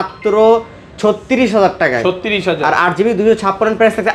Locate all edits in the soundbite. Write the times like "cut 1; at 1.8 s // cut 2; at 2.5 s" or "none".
none